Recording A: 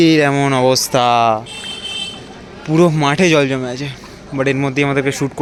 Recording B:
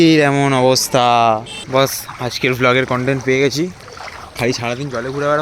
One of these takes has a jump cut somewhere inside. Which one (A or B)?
B